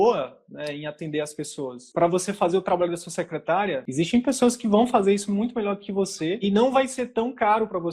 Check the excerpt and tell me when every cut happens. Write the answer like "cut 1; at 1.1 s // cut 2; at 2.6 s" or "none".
cut 1; at 1.8 s // cut 2; at 3.9 s // cut 3; at 6.4 s